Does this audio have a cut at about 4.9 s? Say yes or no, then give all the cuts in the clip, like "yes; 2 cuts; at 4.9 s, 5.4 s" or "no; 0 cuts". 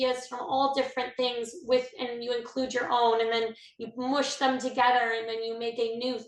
no; 0 cuts